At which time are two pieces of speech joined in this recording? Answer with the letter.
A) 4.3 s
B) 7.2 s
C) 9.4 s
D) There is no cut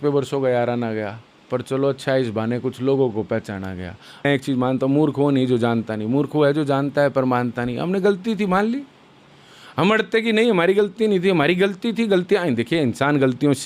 A